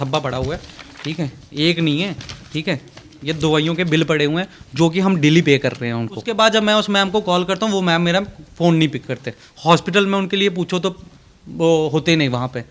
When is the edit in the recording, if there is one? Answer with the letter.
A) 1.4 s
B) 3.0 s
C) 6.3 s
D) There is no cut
C